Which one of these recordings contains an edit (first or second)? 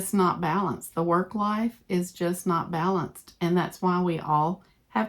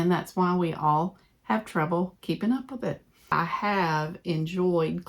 second